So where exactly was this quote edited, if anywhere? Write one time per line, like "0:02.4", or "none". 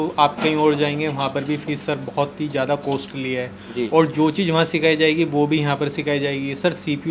none